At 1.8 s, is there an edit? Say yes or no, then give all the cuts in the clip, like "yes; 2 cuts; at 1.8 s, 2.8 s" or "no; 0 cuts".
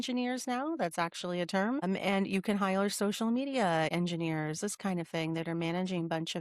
yes; 2 cuts; at 1.8 s, 3.9 s